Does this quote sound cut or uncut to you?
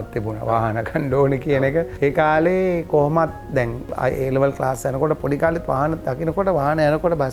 uncut